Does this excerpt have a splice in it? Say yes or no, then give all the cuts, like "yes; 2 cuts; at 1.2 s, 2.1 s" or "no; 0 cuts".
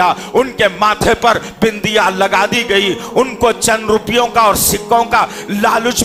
no; 0 cuts